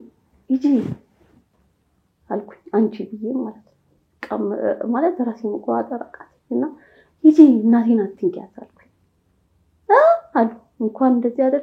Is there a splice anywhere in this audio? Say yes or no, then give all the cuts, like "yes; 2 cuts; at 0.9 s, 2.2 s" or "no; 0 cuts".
no; 0 cuts